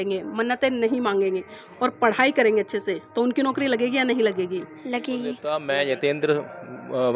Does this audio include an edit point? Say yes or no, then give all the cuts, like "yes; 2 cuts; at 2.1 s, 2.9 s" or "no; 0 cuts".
yes; 1 cut; at 5.5 s